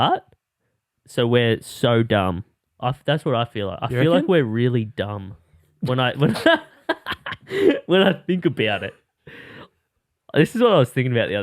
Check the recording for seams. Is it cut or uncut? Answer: uncut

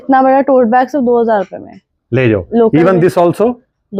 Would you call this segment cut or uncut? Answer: uncut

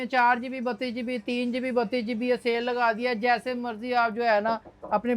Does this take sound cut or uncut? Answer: uncut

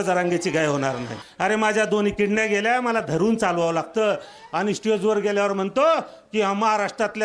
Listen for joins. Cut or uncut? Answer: cut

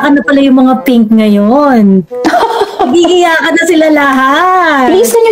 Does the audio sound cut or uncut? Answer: uncut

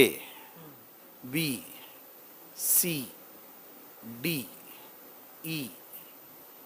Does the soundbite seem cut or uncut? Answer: uncut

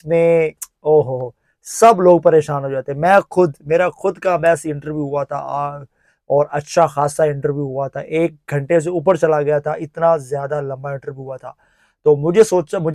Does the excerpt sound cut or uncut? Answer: uncut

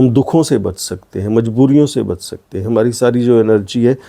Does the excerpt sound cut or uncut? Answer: uncut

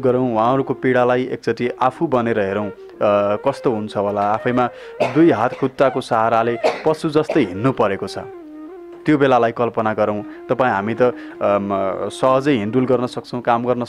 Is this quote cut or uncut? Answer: uncut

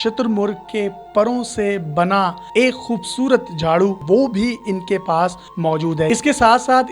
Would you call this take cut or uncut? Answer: cut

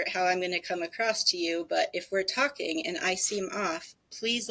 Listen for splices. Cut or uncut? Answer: uncut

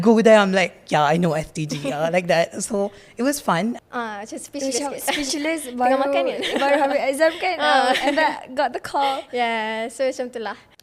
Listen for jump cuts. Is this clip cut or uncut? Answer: cut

